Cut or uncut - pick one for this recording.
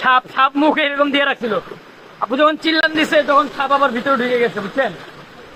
uncut